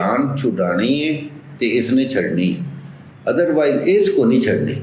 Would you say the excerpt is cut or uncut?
uncut